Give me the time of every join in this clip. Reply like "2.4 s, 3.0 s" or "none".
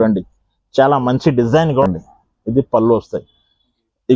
1.8 s